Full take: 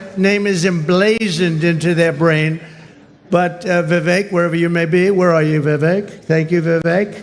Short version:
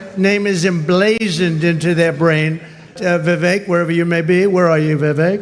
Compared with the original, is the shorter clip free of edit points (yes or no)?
no